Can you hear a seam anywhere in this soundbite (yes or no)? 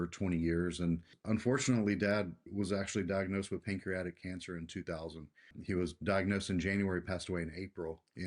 yes